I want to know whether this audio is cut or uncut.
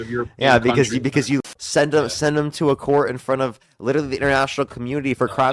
cut